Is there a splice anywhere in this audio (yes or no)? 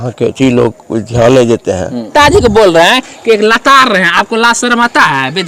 yes